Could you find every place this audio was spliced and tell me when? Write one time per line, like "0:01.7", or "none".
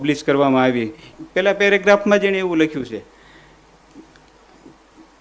0:01.1